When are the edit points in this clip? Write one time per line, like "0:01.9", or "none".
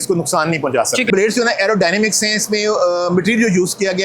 0:01.1